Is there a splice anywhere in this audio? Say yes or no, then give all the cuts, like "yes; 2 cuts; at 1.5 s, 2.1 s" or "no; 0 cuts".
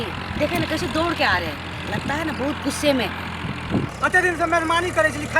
yes; 1 cut; at 3.9 s